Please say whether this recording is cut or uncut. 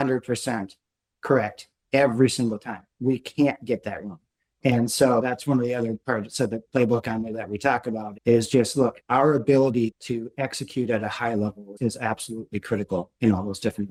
uncut